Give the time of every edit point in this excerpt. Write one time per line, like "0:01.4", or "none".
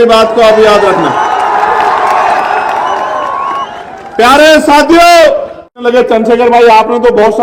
0:05.7